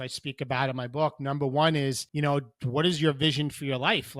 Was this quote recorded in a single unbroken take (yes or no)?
no